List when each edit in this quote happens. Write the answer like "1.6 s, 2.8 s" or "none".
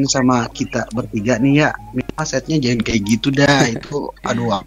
none